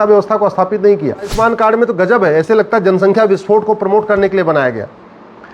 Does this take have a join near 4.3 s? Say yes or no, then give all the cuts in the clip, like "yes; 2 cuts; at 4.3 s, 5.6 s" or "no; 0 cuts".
no; 1 cut; at 1.3 s